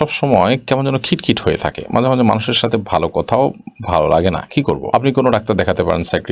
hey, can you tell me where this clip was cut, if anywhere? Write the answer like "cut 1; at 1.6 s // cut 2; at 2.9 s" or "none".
none